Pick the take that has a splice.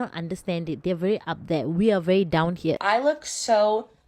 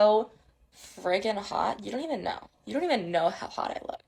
first; 1 cut; at 2.8 s

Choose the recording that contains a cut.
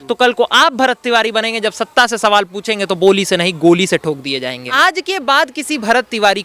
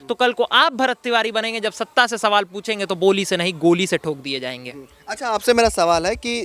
first; 1 cut; at 4.7 s

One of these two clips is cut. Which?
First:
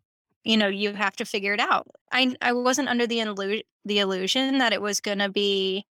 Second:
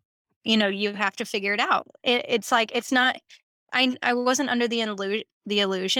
first; 1 cut; at 1.9 s

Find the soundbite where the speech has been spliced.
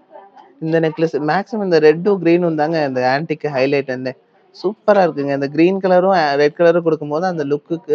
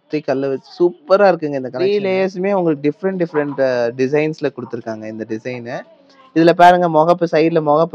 second; 1 cut; at 1.7 s

